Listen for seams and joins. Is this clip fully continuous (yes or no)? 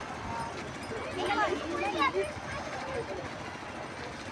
yes